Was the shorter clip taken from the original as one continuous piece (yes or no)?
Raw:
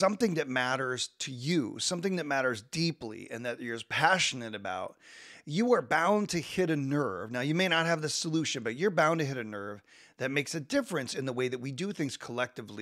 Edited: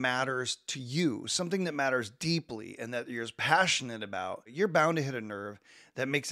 no